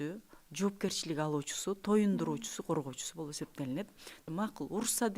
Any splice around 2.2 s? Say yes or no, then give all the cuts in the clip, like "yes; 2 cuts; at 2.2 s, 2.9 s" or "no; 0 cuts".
no; 1 cut; at 4.1 s